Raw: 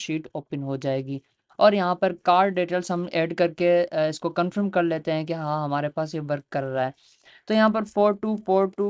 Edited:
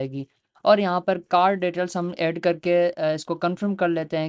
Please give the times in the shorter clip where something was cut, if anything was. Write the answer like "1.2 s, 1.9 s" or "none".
none